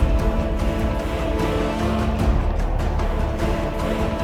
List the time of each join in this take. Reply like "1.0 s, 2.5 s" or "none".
none

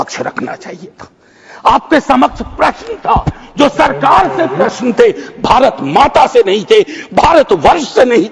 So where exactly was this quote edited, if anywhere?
none

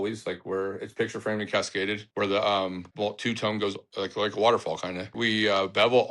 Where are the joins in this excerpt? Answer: 2.0 s, 2.8 s, 3.9 s, 5.1 s

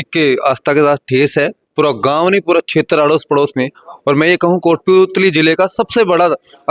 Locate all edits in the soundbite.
none

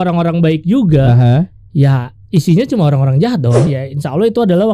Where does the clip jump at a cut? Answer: 3.7 s

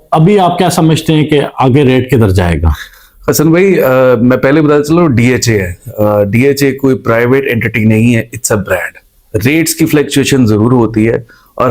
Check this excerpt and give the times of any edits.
none

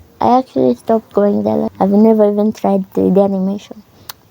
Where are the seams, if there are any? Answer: 1.7 s

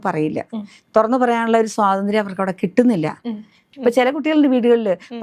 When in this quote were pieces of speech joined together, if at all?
3.7 s

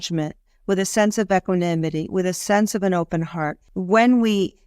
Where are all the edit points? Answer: 3.7 s

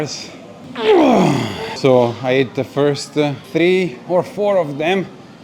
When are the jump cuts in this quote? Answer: 1.8 s, 3.4 s

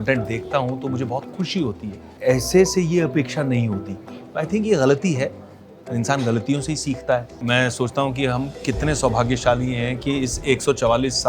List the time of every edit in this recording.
2.1 s, 7.3 s

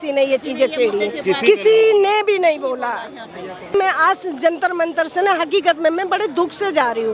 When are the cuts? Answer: 3.7 s

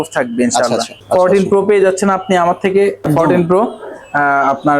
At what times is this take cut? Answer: 1.4 s, 3.1 s

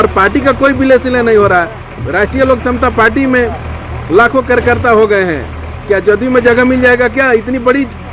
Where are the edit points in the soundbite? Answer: none

